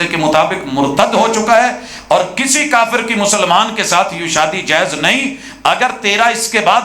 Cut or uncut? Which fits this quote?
uncut